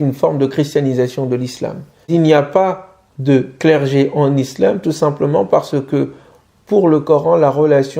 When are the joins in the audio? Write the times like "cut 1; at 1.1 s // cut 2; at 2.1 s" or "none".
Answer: cut 1; at 2.1 s

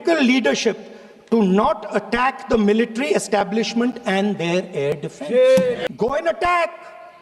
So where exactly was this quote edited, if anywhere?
cut 1; at 5.8 s

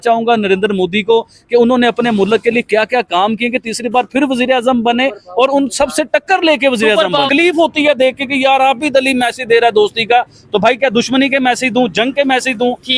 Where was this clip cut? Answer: cut 1; at 7.3 s

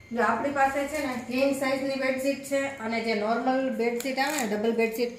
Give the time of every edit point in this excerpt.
none

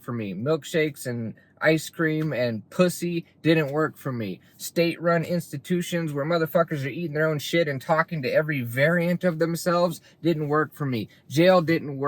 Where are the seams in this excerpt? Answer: none

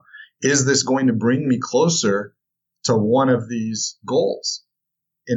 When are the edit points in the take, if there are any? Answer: none

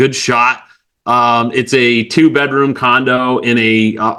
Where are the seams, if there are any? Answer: none

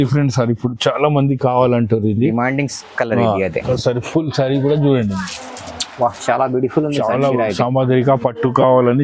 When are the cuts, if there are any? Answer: cut 1; at 3.6 s

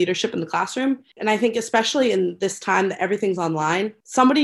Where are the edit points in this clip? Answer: cut 1; at 1.1 s

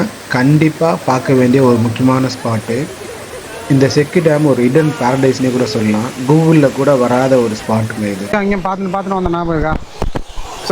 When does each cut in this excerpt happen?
cut 1; at 8.2 s

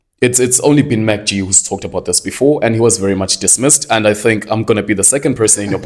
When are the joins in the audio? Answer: none

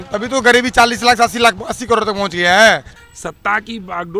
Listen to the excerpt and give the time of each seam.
cut 1; at 2.9 s

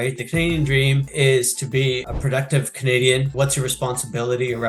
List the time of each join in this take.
cut 1; at 1.1 s // cut 2; at 2.1 s // cut 3; at 3.3 s

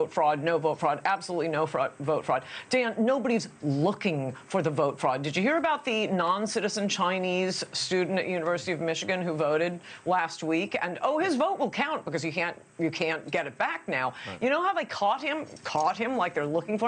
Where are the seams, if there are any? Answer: cut 1; at 2.5 s

